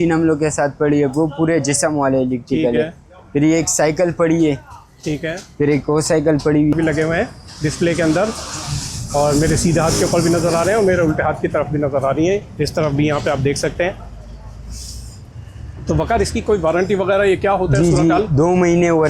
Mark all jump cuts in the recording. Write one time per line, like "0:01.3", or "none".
0:06.7
0:12.5